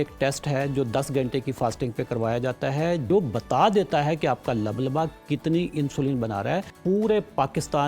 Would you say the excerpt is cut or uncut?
cut